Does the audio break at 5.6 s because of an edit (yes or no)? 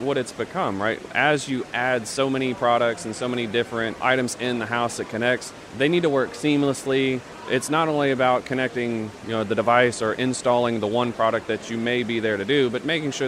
yes